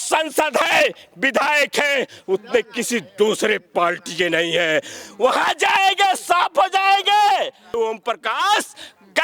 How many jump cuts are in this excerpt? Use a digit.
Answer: 1